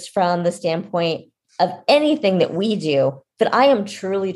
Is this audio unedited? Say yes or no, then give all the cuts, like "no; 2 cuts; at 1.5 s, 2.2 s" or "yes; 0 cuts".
yes; 0 cuts